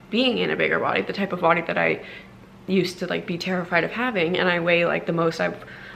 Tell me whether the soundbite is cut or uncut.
uncut